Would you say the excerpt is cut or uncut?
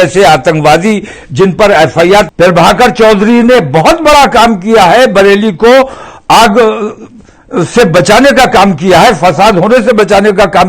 cut